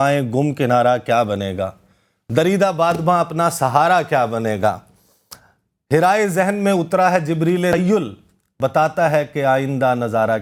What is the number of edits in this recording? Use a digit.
0